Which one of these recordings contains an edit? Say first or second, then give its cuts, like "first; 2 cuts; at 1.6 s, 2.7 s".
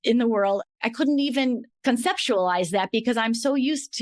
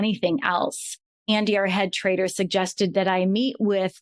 second; 1 cut; at 1.1 s